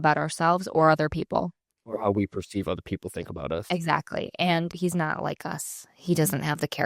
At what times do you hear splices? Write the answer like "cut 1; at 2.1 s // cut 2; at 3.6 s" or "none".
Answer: cut 1; at 4.7 s